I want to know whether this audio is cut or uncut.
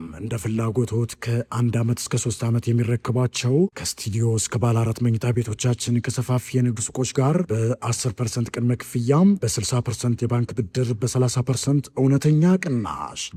uncut